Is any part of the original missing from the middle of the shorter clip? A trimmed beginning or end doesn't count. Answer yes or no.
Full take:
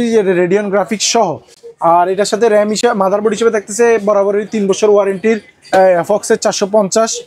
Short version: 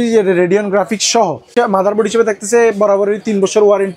yes